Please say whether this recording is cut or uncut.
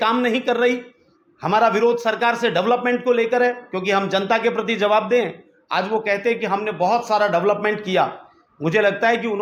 uncut